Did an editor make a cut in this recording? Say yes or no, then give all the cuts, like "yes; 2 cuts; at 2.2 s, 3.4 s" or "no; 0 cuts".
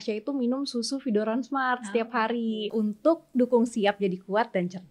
yes; 1 cut; at 2.7 s